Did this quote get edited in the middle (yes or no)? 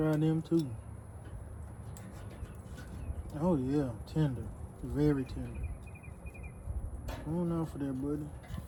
no